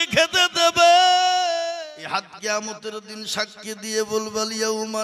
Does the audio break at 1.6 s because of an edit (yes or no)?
yes